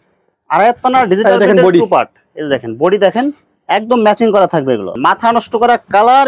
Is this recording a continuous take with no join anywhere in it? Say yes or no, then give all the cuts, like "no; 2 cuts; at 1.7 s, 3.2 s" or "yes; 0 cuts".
no; 1 cut; at 4.9 s